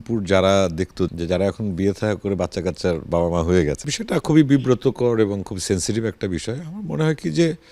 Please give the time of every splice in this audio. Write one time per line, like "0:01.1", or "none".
0:01.1
0:03.9